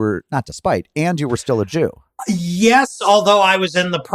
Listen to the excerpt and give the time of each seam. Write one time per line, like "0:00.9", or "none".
0:02.1

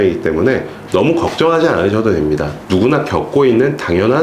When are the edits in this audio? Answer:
0:02.5

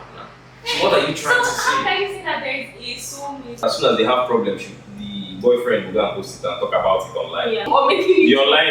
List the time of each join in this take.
0:03.6
0:07.6

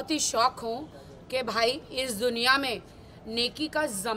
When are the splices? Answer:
none

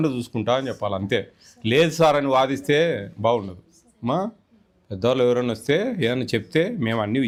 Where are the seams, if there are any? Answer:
none

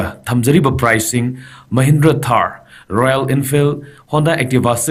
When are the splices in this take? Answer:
none

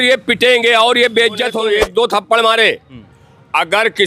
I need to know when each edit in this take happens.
0:01.6

